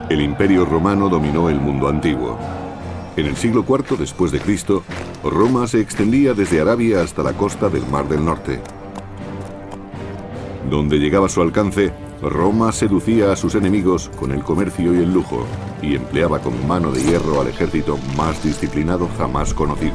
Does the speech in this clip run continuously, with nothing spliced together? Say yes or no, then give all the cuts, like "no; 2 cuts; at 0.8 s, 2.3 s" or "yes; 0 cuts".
yes; 0 cuts